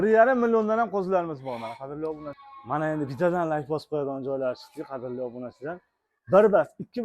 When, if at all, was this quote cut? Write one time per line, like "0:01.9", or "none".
0:02.4